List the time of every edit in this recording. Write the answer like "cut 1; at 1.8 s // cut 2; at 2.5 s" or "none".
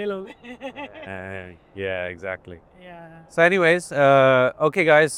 none